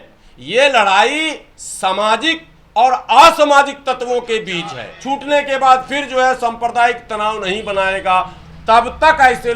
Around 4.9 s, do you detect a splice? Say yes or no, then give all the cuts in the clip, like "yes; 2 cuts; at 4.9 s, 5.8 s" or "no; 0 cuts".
yes; 1 cut; at 4.9 s